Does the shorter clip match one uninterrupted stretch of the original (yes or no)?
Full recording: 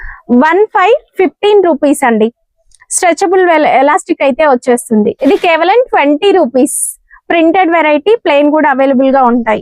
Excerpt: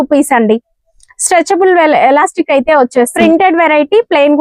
no